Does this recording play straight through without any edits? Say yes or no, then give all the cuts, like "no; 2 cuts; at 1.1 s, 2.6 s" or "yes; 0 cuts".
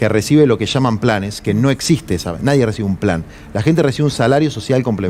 yes; 0 cuts